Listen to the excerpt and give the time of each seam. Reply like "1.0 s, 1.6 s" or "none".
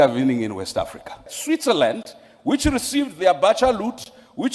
1.3 s